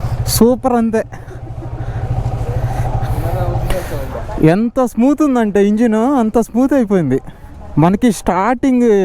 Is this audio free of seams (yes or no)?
yes